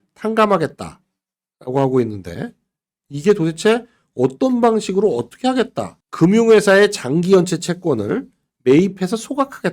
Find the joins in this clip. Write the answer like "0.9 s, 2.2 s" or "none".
none